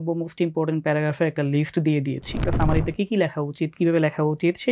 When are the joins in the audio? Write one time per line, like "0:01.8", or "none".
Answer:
0:02.5